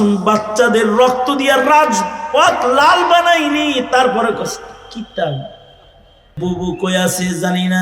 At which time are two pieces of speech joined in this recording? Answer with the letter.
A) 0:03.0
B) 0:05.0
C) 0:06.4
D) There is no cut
C